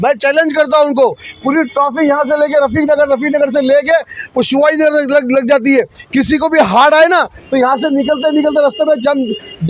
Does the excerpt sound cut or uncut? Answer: uncut